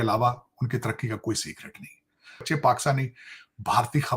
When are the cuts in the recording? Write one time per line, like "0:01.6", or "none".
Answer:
0:02.4